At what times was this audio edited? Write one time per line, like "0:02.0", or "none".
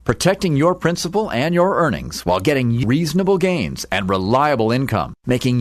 0:02.8